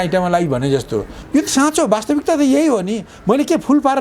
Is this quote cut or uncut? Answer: cut